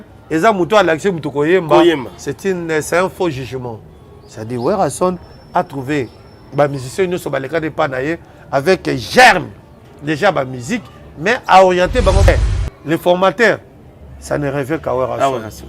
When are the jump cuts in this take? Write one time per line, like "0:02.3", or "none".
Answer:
0:12.3